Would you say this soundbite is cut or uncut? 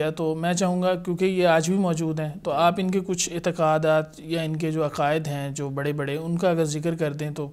uncut